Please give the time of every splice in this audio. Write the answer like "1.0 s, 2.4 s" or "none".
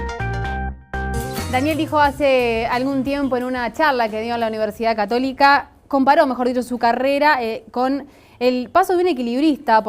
1.1 s